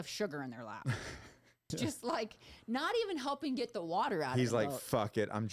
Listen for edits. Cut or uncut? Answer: cut